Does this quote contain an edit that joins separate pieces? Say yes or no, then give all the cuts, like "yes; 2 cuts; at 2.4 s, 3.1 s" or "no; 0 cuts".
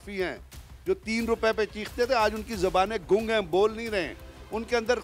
no; 0 cuts